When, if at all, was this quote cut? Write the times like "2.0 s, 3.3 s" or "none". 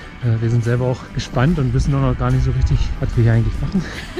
1.1 s, 2.9 s